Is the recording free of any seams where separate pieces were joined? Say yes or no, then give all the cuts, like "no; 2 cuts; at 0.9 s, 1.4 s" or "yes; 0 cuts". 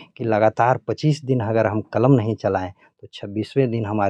yes; 0 cuts